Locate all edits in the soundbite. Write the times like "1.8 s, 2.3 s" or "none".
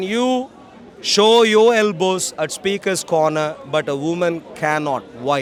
none